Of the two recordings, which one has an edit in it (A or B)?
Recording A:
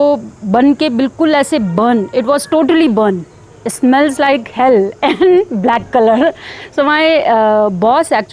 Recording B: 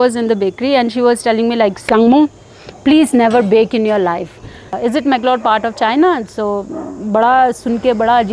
B